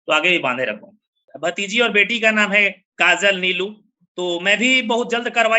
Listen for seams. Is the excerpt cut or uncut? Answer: cut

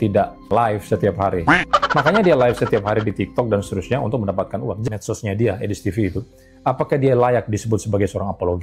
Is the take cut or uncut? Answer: cut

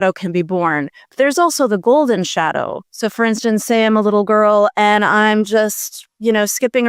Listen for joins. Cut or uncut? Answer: uncut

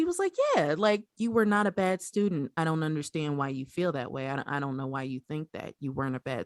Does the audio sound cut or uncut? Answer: cut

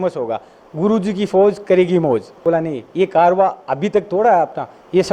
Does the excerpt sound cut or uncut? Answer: cut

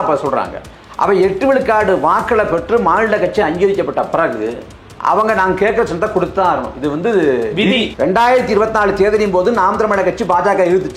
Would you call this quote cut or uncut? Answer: cut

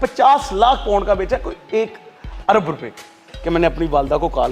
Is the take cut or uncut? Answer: uncut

